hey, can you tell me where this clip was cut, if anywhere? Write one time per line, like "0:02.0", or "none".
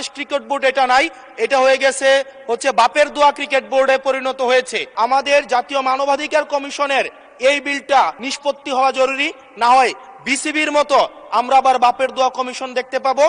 0:04.8
0:08.2